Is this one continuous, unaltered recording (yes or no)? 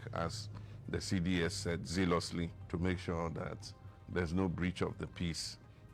no